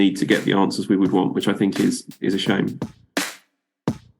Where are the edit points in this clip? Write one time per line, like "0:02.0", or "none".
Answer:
0:02.8

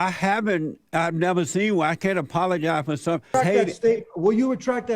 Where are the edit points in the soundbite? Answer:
0:03.3

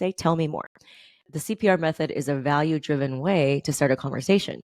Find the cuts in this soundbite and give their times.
0:01.2

